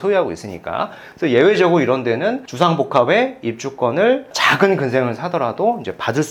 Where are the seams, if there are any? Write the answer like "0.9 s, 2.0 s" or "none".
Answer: none